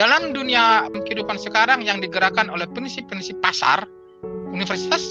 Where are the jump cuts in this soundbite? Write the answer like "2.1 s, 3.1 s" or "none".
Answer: 1.0 s